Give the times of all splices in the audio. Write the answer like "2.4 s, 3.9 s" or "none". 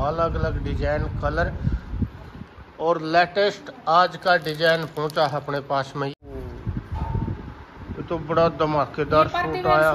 6.1 s